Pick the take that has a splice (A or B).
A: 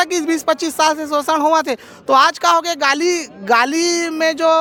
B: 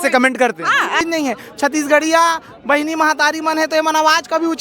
B